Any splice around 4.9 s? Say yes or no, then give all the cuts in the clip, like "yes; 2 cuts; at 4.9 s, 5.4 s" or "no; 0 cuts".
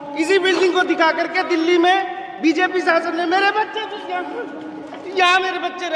yes; 1 cut; at 4.9 s